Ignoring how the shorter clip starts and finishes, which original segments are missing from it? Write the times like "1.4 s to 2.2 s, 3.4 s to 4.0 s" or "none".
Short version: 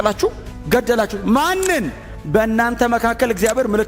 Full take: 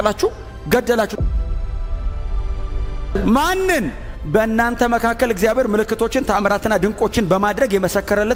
1.1 s to 3.1 s